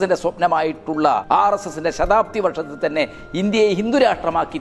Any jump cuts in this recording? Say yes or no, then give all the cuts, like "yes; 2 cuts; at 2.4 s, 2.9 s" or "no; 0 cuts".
yes; 1 cut; at 1.2 s